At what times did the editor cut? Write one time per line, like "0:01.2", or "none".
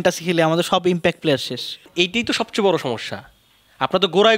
0:01.9

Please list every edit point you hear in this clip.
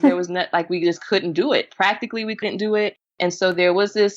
0:03.1

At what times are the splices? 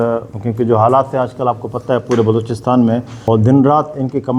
0:03.1

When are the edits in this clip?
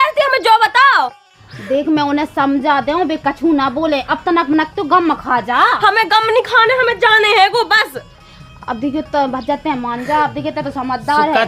none

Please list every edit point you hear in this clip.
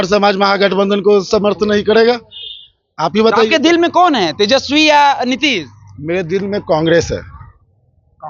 none

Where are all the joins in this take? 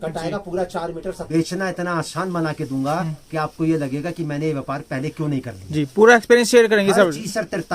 0:01.2

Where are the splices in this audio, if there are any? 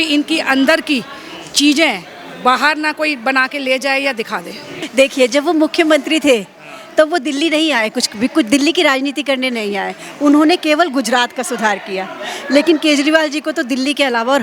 0:04.8

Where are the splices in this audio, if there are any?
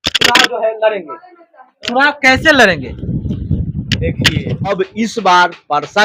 0:04.7

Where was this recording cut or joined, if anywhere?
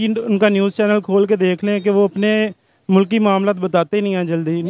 none

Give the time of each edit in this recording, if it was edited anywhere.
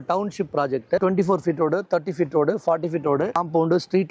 0:01.0
0:03.4

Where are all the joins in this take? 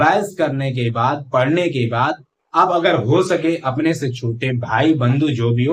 none

